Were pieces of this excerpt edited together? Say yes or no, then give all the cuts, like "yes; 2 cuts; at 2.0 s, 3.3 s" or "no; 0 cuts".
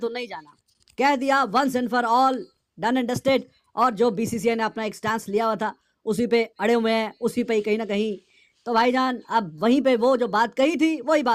no; 0 cuts